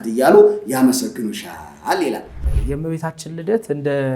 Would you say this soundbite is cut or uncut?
cut